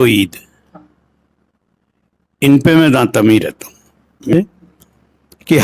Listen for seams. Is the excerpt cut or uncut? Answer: cut